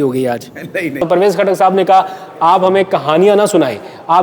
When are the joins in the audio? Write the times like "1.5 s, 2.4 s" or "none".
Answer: 1.0 s